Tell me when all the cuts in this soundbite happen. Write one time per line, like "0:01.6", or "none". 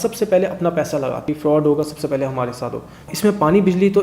0:01.4
0:03.0